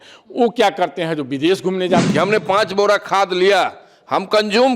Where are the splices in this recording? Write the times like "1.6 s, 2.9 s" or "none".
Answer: 2.1 s

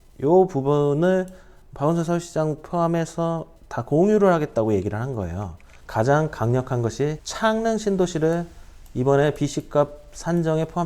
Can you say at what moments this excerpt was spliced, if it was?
5.8 s

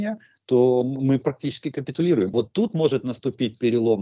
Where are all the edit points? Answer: 2.3 s

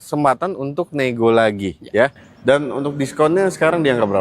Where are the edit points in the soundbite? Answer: 2.3 s

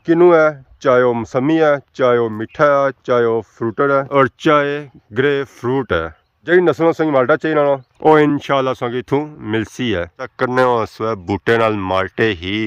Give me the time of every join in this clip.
10.2 s

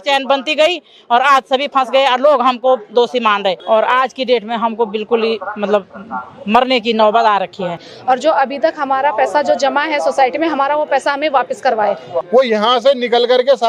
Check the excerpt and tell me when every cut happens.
3.6 s, 7.9 s, 12.1 s

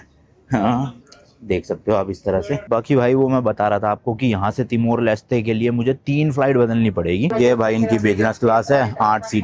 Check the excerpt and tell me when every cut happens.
2.6 s, 7.3 s

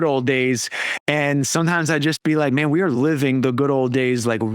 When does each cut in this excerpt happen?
3.0 s

